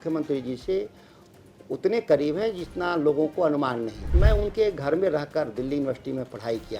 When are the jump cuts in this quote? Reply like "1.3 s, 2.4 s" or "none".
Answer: 4.0 s